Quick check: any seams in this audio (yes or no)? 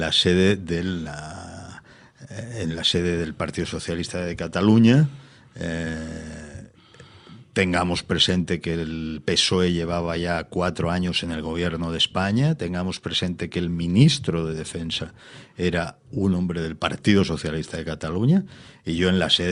no